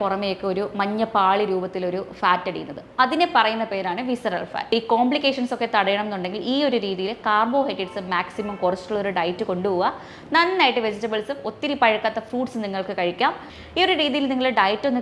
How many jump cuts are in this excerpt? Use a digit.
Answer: 2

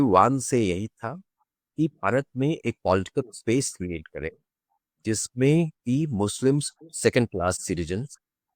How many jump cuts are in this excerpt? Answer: 0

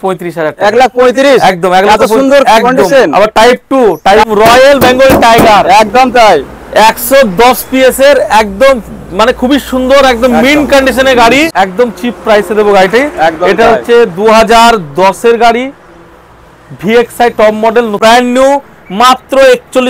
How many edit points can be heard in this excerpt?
3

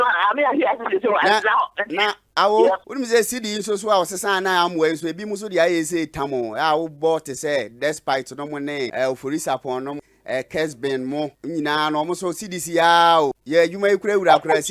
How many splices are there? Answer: 5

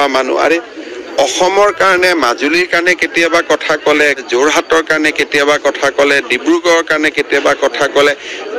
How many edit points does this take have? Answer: 1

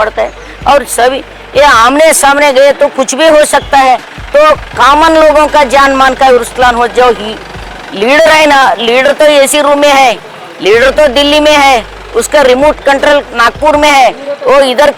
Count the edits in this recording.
0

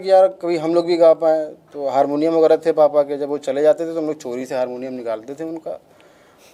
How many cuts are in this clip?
0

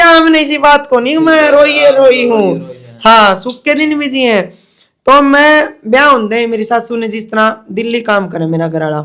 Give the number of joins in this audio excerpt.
0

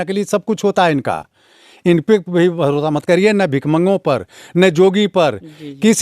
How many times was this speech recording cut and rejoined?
0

